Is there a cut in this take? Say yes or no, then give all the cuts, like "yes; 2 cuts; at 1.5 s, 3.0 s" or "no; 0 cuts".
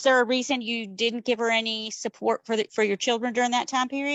no; 0 cuts